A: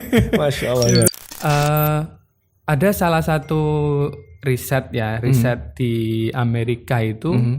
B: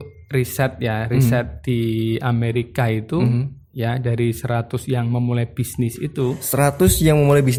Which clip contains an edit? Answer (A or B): A